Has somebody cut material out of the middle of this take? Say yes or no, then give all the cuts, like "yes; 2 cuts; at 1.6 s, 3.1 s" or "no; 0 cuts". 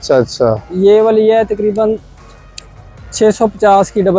no; 0 cuts